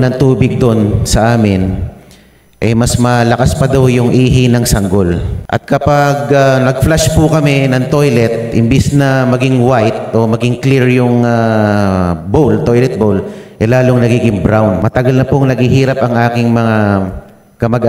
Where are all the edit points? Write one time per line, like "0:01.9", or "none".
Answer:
0:05.3
0:14.8